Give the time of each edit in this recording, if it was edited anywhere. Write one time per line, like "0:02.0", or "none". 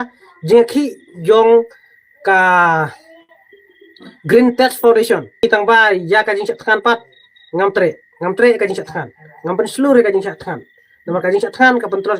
0:05.4